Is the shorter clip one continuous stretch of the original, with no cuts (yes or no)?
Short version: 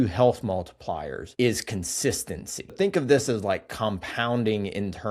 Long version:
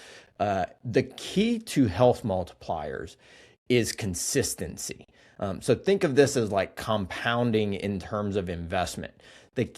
no